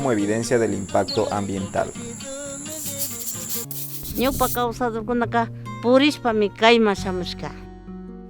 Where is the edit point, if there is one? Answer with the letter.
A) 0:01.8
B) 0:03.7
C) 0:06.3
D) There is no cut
B